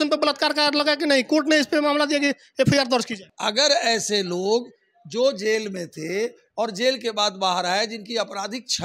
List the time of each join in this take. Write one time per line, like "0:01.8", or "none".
0:03.2